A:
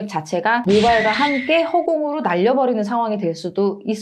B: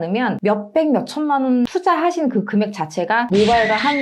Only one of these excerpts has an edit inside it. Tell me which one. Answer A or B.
B